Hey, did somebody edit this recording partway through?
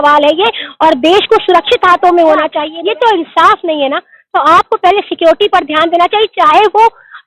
yes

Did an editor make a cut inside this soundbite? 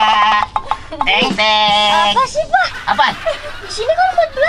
no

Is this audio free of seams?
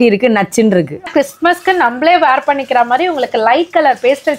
no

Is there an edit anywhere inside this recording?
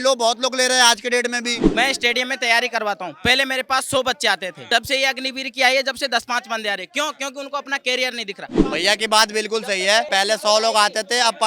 yes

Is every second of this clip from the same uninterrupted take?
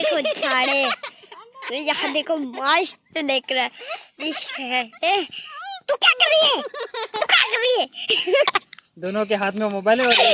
no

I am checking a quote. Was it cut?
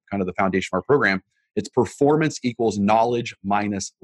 no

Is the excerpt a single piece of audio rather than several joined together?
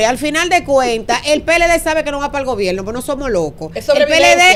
yes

